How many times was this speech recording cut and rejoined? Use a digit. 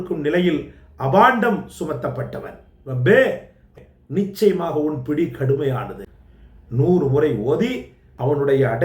3